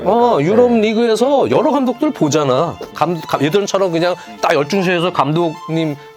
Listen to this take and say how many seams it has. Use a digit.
1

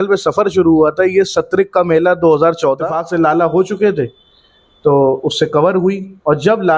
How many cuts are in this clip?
1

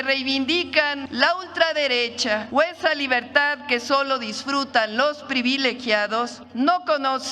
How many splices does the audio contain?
3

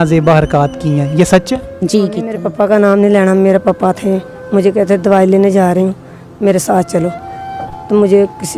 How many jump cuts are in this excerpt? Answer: 1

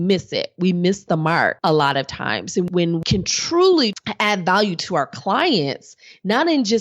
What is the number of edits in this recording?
3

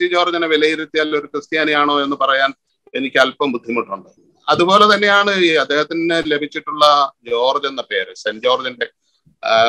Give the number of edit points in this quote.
1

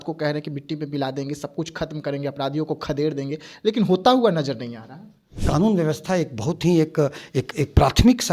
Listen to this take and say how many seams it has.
1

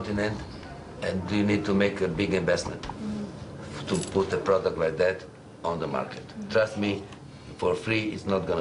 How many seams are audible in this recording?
1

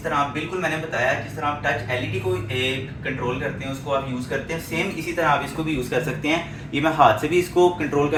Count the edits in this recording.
0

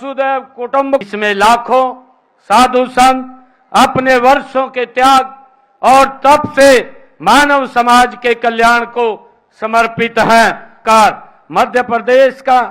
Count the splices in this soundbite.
2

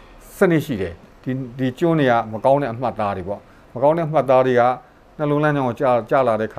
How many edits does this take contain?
1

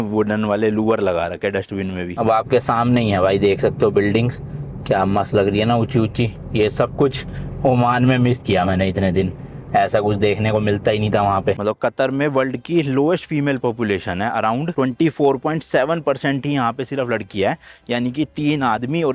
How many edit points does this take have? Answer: 2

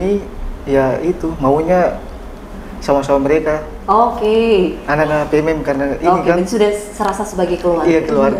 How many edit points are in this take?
0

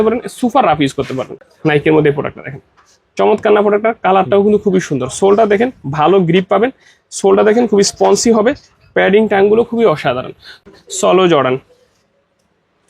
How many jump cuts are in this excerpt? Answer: 2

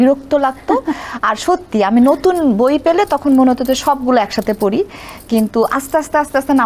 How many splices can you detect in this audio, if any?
0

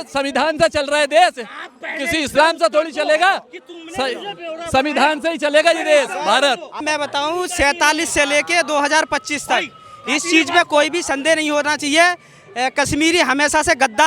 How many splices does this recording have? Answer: 1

